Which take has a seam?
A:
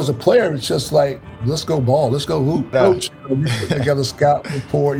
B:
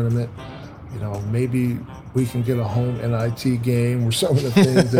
A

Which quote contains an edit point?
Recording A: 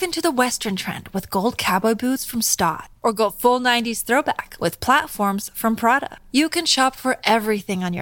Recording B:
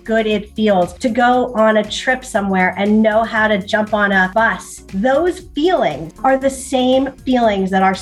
B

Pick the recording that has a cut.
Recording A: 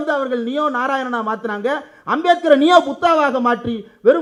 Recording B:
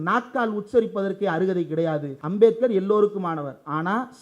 B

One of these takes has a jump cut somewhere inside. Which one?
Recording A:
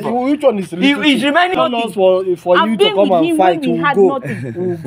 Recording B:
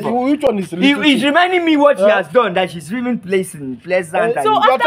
A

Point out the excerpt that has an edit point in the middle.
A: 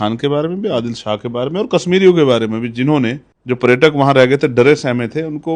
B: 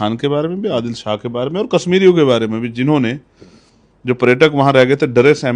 A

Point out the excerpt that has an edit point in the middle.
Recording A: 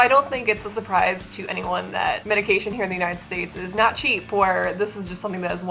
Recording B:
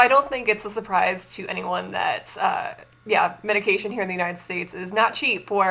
A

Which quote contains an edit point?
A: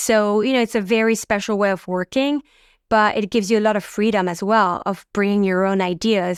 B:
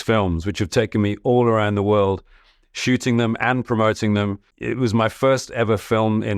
B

